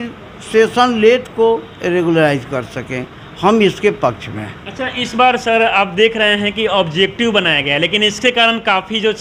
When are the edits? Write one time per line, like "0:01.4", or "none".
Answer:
none